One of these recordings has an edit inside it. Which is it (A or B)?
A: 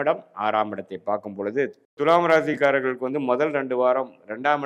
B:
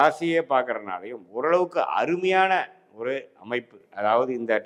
A